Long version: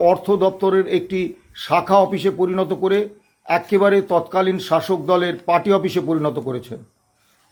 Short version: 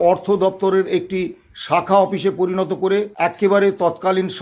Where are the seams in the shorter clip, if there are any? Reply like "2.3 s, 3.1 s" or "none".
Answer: 3.1 s